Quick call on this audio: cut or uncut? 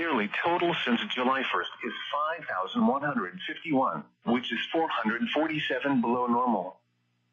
cut